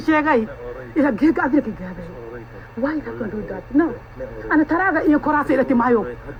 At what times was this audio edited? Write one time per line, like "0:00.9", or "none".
none